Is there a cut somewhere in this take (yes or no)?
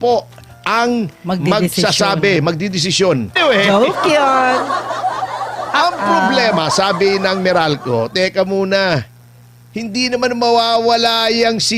yes